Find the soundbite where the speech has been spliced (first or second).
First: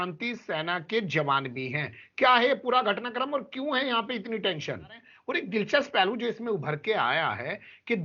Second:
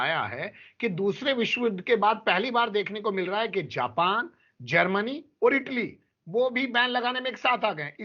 first